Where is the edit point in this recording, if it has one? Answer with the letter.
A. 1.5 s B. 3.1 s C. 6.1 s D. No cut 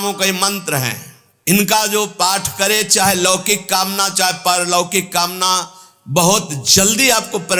D